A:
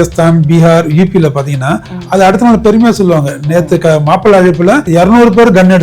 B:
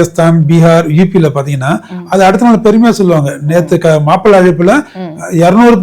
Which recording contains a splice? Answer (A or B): A